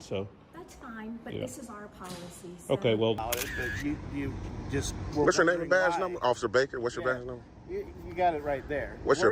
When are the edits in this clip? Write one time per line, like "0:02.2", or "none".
0:03.2